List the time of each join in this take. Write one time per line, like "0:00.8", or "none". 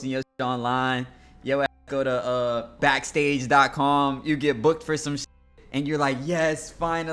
0:02.8